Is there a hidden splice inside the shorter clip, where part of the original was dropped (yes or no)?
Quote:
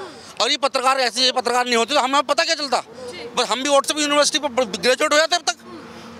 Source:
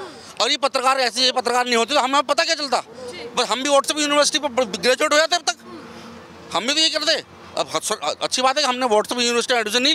no